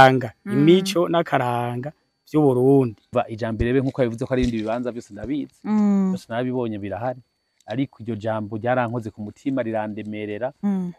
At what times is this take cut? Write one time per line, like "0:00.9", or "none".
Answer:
0:03.1

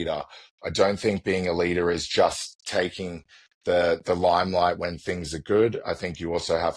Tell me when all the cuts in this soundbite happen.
none

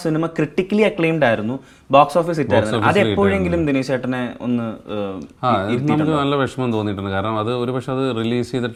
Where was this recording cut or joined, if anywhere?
none

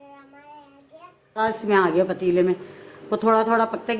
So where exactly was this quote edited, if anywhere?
0:01.2

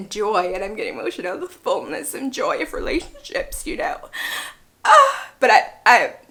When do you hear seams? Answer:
none

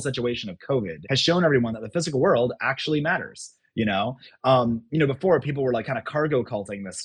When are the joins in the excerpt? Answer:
0:01.0

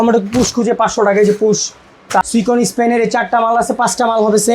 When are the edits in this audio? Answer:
0:02.2

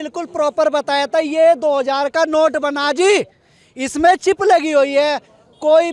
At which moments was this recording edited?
none

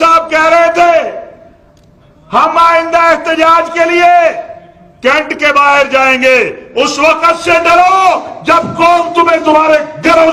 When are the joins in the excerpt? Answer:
none

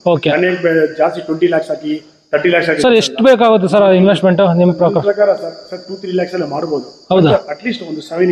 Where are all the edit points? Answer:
none

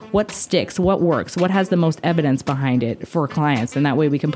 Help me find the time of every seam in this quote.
none

